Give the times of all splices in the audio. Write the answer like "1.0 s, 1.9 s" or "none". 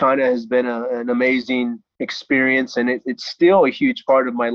none